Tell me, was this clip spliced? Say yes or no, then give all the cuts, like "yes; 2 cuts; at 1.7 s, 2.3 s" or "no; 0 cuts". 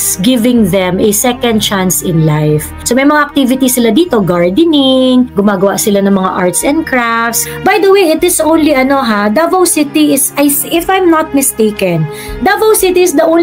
yes; 3 cuts; at 2.7 s, 5.3 s, 7.3 s